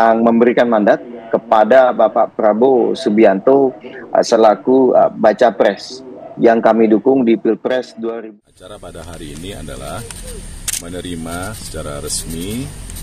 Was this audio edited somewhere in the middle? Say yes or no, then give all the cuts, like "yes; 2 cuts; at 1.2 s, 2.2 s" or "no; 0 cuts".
yes; 1 cut; at 8.0 s